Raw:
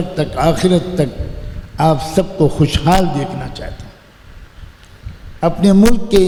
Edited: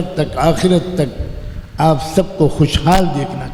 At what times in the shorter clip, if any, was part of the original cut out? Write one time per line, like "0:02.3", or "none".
none